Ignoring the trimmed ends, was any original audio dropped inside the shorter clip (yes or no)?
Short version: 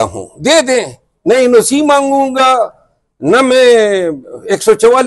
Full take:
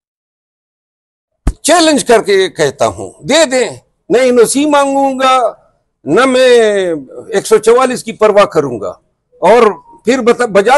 no